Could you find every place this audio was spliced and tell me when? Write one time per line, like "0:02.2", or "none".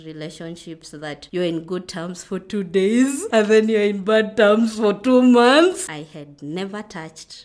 0:01.2
0:03.2
0:05.8